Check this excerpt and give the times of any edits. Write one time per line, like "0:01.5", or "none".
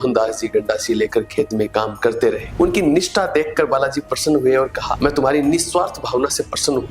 0:02.4